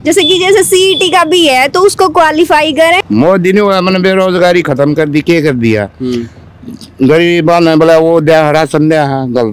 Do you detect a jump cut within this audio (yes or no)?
yes